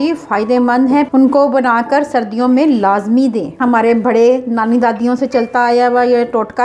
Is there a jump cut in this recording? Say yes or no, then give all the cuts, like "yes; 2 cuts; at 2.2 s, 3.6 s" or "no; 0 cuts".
yes; 2 cuts; at 1.1 s, 3.6 s